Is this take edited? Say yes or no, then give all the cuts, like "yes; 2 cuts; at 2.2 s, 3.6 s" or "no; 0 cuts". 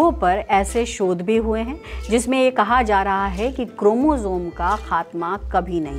no; 0 cuts